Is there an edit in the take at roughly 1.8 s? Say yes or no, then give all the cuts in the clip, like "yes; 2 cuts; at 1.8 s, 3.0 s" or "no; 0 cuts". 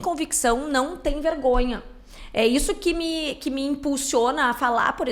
no; 0 cuts